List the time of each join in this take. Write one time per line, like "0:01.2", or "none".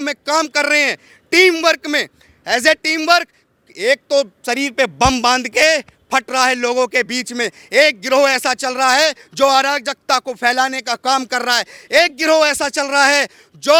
none